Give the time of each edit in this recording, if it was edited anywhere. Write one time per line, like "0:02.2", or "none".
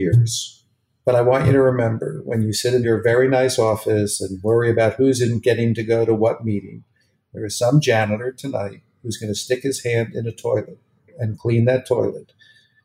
0:11.2